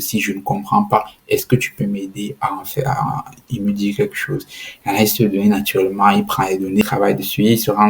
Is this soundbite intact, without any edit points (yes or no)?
no